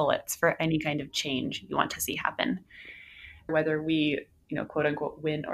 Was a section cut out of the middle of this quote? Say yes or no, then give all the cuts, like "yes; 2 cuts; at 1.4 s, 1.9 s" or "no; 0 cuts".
yes; 1 cut; at 3.5 s